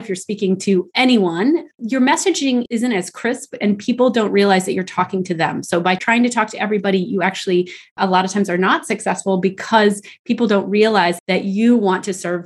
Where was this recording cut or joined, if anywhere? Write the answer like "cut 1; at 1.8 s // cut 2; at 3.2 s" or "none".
none